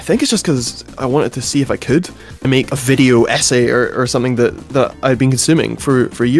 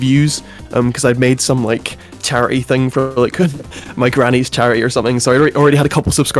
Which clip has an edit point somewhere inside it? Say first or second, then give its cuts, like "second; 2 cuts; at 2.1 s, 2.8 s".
first; 2 cuts; at 2.4 s, 4.6 s